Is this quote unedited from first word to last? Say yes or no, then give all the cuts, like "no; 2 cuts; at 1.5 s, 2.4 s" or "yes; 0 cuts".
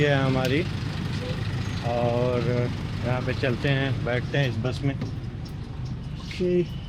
yes; 0 cuts